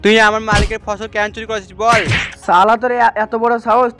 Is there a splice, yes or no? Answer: yes